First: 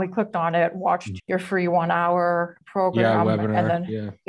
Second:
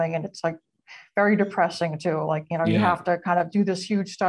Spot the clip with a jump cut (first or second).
first